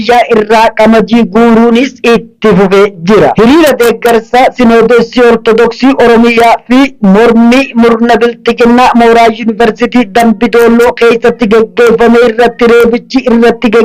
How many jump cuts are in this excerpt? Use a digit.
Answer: 1